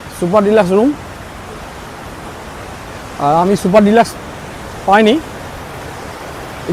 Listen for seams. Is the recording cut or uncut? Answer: uncut